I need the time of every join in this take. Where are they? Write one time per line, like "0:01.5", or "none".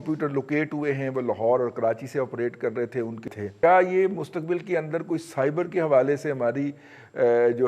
0:03.2